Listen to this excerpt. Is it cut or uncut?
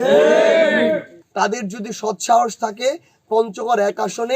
cut